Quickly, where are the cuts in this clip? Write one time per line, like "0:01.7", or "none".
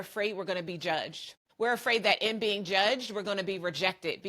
0:01.4